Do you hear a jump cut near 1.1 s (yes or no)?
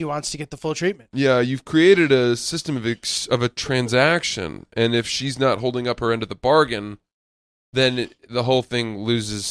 yes